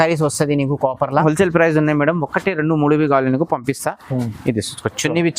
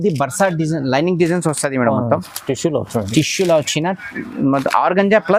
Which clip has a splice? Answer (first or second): first